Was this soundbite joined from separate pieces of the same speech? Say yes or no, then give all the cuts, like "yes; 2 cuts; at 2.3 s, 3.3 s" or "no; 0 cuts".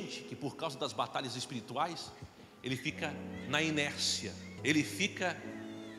yes; 1 cut; at 4.5 s